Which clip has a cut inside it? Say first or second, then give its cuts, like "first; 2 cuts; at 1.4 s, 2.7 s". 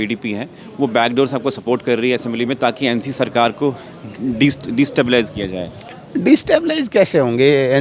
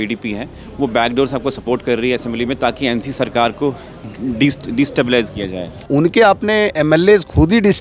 second; 1 cut; at 5.8 s